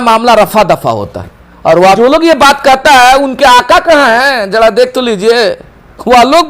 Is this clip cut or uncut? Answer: cut